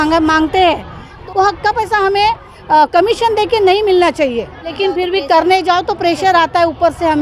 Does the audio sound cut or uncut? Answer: cut